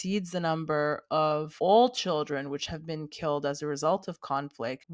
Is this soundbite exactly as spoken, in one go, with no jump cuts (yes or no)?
no